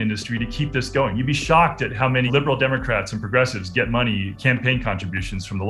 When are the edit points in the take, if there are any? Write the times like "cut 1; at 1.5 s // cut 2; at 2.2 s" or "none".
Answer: cut 1; at 2.3 s